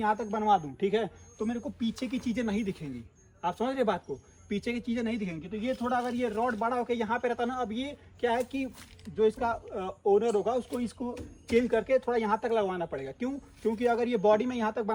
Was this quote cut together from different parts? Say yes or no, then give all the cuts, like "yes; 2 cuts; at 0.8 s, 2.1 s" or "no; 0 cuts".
no; 0 cuts